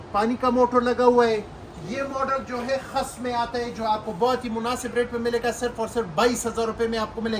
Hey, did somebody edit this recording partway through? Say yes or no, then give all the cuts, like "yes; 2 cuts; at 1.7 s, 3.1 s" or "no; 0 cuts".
no; 0 cuts